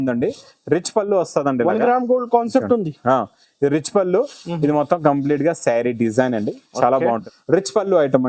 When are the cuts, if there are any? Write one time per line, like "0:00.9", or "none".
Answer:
0:07.2